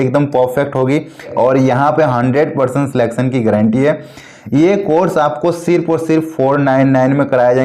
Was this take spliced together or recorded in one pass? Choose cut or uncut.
cut